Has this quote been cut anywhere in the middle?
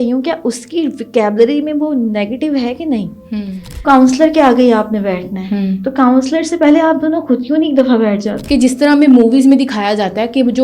yes; 2 cuts; at 3.8 s, 8.3 s

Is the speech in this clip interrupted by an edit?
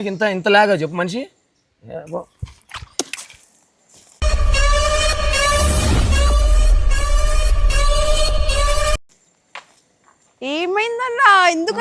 no; 0 cuts

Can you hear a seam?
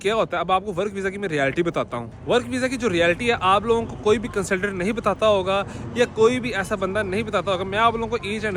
no; 0 cuts

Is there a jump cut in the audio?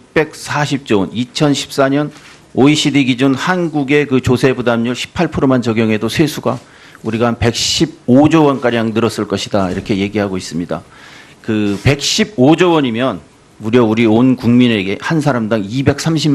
no; 0 cuts

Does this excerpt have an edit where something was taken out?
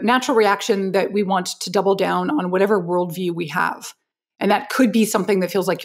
no; 0 cuts

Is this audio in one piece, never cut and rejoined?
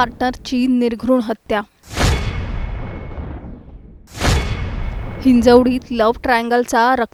yes; 0 cuts

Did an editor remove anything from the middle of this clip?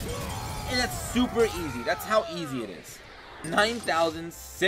yes; 1 cut; at 3.4 s

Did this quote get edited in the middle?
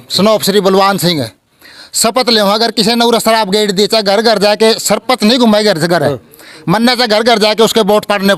no; 0 cuts

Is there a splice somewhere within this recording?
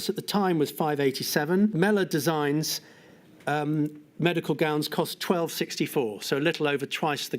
yes; 1 cut; at 1.7 s

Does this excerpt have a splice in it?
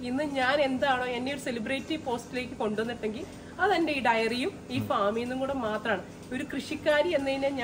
no; 0 cuts

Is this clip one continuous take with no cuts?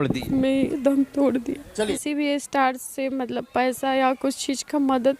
no; 1 cut; at 2.0 s

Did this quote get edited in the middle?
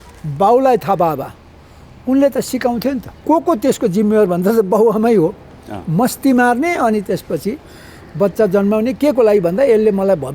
yes; 1 cut; at 3.1 s

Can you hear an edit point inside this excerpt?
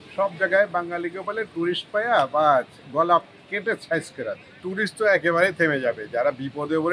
yes; 1 cut; at 4.6 s

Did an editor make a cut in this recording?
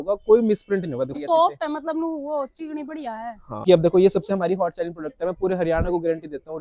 yes; 2 cuts; at 1.2 s, 3.6 s

